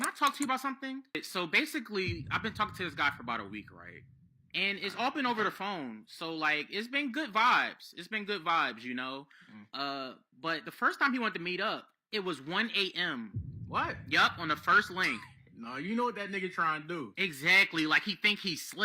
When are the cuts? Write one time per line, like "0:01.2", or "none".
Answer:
0:01.2